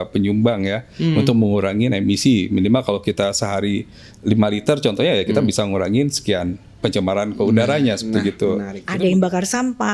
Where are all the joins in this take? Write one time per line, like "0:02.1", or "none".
0:08.8